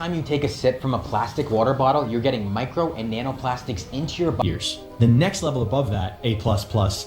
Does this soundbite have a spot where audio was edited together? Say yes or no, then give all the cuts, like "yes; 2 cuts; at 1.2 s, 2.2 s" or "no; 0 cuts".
yes; 1 cut; at 4.4 s